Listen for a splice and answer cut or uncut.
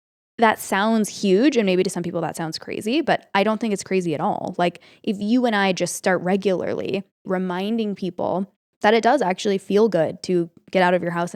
cut